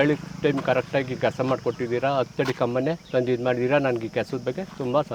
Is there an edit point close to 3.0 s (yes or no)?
yes